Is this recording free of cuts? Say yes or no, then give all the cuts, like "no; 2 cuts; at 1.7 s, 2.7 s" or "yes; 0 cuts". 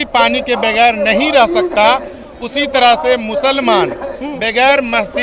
yes; 0 cuts